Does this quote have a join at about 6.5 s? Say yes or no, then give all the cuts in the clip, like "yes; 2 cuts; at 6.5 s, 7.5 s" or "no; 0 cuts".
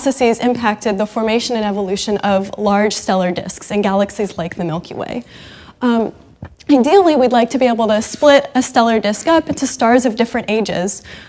no; 1 cut; at 10.0 s